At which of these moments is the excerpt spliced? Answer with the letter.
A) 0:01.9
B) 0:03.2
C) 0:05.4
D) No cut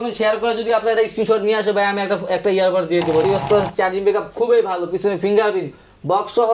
B